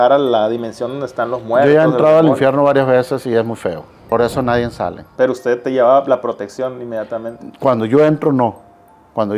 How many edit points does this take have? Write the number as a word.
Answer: two